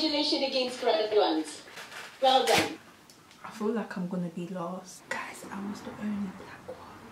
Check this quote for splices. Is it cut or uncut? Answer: cut